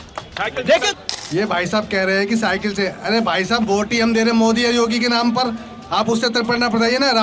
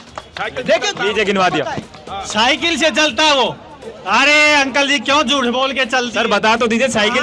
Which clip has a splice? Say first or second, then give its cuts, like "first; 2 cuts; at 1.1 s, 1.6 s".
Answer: first; 1 cut; at 0.9 s